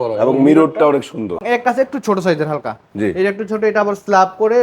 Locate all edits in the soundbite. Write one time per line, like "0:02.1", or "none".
0:01.4